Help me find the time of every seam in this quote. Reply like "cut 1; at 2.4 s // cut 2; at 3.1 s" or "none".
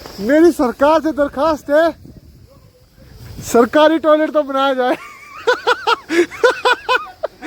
none